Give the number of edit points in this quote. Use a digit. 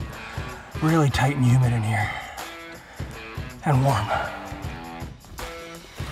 1